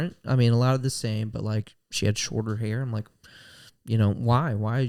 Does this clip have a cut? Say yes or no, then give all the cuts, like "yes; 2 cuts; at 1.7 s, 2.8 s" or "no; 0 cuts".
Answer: no; 0 cuts